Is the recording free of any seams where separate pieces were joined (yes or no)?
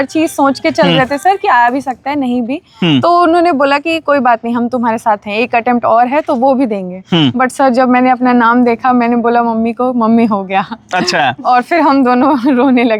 yes